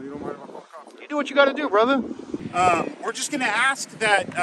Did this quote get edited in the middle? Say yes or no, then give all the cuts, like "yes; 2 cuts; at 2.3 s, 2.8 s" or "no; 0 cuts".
yes; 1 cut; at 2.3 s